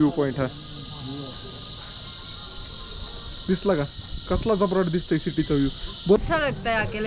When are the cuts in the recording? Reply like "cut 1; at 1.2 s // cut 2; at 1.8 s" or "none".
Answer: cut 1; at 6.2 s